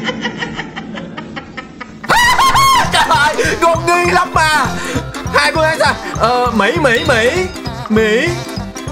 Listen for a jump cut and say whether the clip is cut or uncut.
cut